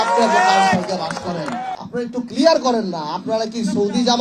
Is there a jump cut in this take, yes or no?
yes